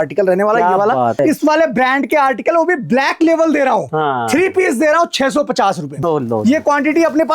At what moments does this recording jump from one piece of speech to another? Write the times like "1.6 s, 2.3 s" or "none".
1.2 s, 5.9 s